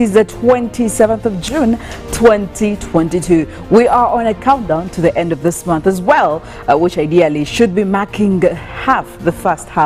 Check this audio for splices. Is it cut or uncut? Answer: uncut